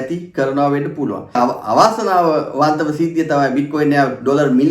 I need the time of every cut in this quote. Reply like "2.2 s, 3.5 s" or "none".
1.4 s